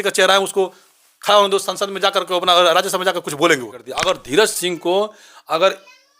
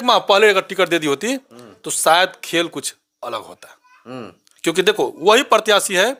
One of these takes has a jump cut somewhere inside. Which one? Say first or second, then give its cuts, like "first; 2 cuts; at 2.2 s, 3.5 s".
first; 1 cut; at 3.9 s